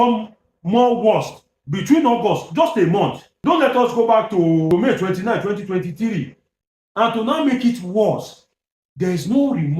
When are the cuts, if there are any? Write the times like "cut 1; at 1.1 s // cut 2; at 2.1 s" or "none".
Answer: cut 1; at 3.3 s // cut 2; at 4.7 s